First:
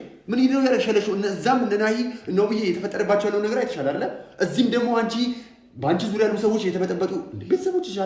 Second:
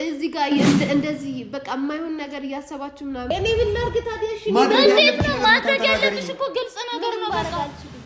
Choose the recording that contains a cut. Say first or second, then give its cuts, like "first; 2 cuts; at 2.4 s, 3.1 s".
second; 1 cut; at 3.3 s